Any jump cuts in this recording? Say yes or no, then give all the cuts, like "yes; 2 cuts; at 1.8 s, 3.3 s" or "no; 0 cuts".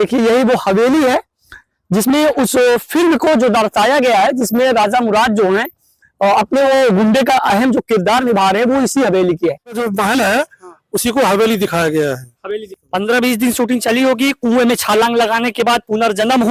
yes; 1 cut; at 9.8 s